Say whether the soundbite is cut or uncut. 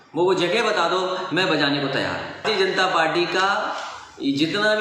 cut